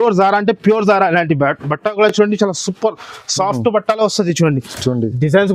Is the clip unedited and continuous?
yes; 0 cuts

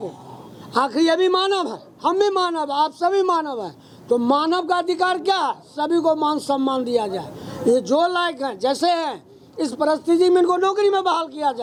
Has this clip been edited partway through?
no; 0 cuts

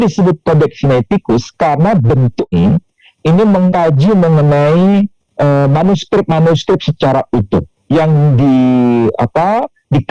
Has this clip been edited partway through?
yes; 1 cut; at 2.5 s

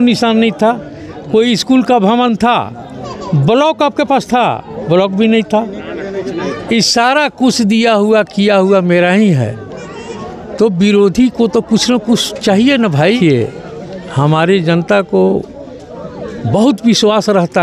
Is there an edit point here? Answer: yes; 1 cut; at 13.2 s

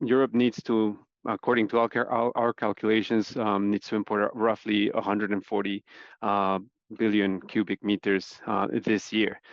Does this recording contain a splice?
no; 0 cuts

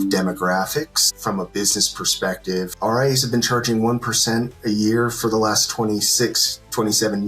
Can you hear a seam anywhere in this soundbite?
yes; 2 cuts; at 1.1 s, 2.7 s

